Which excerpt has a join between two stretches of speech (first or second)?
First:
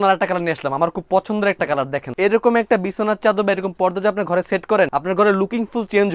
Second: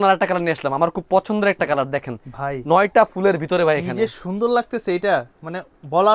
first